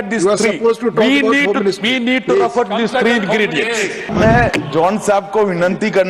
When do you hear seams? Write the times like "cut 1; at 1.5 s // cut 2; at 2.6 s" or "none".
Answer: cut 1; at 4.1 s